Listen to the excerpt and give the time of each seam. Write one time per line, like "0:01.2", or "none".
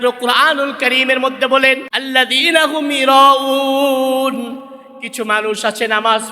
0:01.9